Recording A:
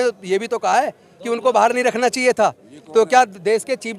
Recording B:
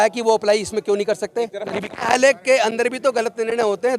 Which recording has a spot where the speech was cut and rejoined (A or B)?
B